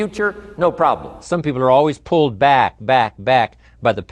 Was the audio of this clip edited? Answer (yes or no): yes